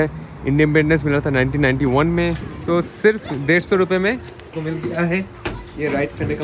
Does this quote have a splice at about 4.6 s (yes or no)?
yes